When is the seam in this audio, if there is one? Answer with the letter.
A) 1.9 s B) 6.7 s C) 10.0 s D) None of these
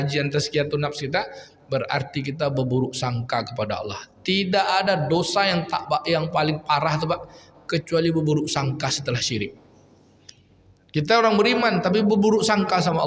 D